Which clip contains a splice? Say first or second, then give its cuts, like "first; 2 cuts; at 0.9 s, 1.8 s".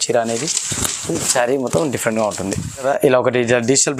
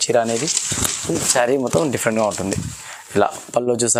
first; 1 cut; at 2.8 s